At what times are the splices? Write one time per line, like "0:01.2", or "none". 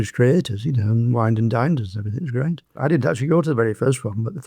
none